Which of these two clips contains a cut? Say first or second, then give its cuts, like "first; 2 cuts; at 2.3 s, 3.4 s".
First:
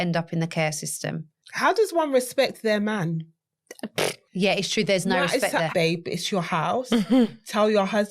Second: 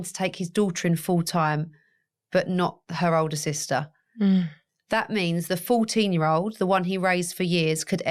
first; 3 cuts; at 1.5 s, 4.2 s, 5.7 s